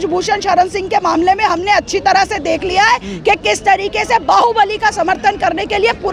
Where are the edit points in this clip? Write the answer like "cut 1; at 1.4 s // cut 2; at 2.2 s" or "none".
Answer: none